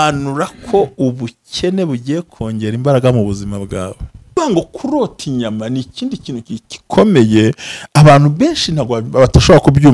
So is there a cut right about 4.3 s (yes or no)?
yes